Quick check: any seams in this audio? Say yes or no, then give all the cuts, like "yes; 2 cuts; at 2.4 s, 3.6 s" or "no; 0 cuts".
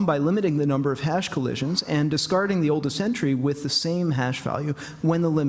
no; 0 cuts